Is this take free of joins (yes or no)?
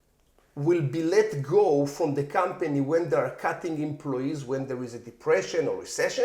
yes